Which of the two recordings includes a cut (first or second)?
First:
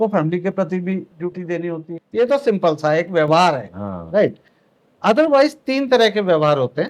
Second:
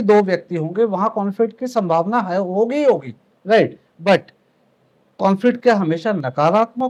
first